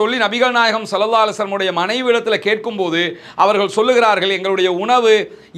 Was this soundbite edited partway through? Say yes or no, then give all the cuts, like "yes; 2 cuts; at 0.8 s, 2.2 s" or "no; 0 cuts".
no; 0 cuts